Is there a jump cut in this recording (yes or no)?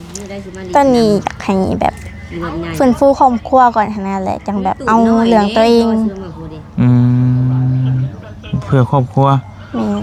no